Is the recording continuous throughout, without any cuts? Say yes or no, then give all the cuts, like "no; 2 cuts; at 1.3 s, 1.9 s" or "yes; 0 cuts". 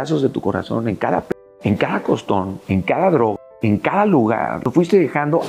no; 4 cuts; at 1.3 s, 2.6 s, 3.4 s, 4.6 s